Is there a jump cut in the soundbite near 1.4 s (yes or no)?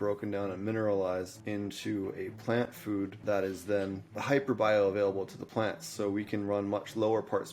yes